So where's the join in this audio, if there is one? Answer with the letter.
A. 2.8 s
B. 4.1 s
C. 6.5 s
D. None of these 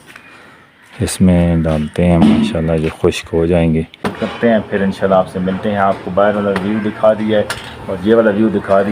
B